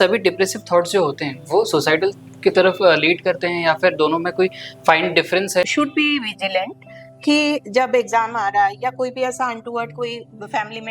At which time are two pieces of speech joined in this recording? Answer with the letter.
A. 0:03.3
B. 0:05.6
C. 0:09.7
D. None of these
B